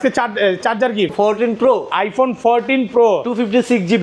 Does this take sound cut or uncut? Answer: cut